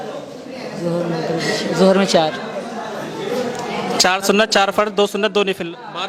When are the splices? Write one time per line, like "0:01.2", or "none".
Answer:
none